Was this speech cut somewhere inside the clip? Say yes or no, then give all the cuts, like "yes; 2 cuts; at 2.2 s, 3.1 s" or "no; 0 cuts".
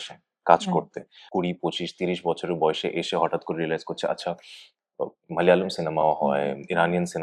yes; 1 cut; at 1.2 s